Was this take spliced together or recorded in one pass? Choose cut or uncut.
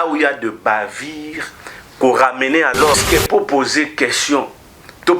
cut